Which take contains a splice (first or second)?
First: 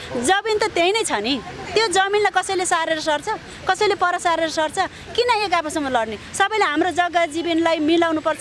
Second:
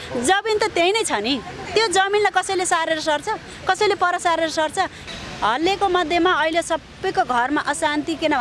second